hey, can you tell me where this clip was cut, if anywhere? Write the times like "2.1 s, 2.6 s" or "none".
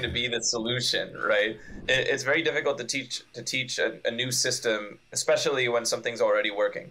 1.8 s